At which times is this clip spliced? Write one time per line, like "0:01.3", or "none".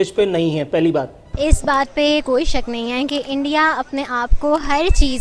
0:01.3